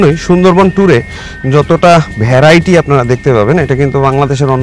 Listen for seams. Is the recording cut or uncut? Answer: uncut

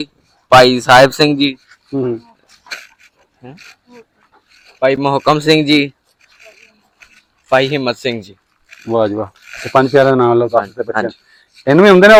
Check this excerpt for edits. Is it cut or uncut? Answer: uncut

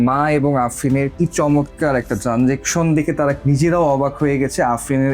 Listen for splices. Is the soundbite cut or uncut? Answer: cut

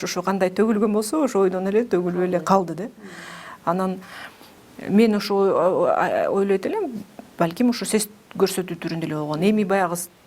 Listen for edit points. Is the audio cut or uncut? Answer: uncut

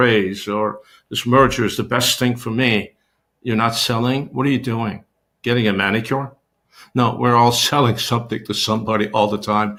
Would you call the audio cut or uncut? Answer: uncut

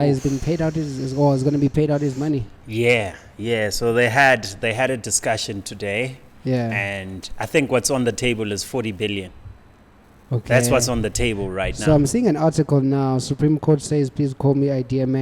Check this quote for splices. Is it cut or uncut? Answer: uncut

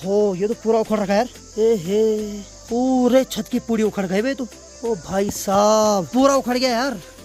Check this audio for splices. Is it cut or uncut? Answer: uncut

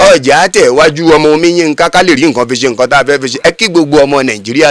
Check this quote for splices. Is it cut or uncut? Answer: uncut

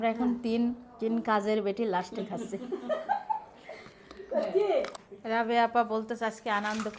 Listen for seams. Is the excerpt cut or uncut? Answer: cut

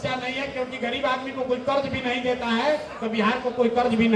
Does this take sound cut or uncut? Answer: uncut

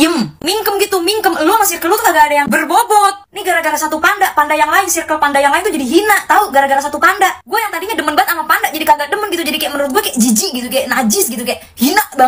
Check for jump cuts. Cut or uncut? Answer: uncut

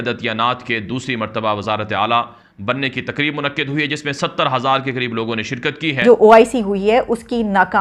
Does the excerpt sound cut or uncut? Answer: cut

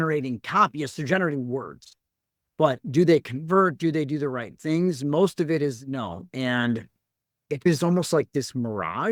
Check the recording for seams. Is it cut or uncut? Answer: uncut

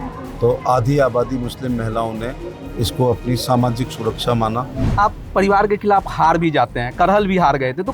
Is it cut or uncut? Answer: cut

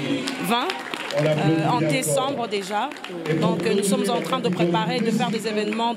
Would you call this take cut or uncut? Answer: uncut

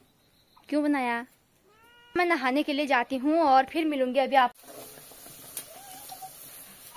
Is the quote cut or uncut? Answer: cut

